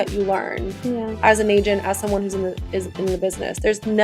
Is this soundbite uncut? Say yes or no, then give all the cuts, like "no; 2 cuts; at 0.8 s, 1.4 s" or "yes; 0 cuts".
yes; 0 cuts